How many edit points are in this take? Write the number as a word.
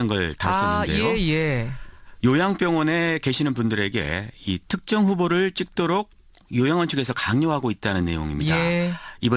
one